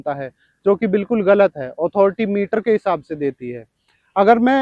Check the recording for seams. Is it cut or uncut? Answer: uncut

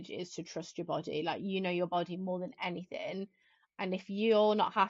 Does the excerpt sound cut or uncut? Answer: uncut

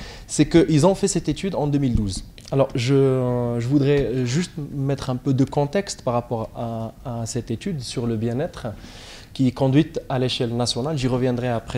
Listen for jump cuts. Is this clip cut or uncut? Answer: cut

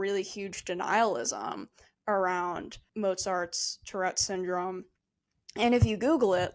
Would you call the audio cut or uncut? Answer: cut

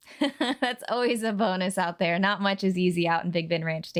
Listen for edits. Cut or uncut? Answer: uncut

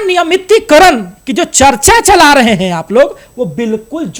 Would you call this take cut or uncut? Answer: uncut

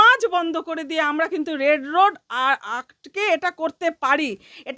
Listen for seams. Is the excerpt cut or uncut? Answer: uncut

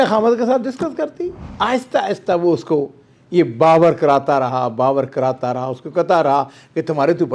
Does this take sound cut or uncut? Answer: cut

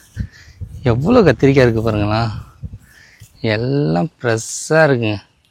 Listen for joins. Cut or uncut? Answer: uncut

